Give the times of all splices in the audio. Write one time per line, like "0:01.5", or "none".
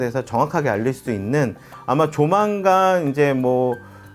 0:01.7